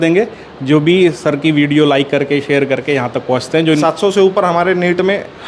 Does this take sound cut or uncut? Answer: cut